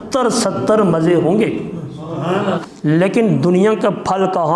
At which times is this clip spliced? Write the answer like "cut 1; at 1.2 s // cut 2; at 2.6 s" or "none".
cut 1; at 2.6 s